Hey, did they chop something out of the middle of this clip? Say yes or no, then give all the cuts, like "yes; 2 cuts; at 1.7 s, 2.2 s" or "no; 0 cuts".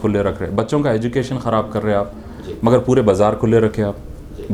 no; 0 cuts